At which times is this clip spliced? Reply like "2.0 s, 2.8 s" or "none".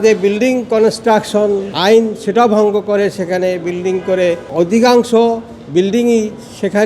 1.7 s, 4.5 s